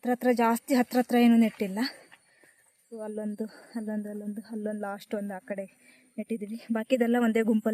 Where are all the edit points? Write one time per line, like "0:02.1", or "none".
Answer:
none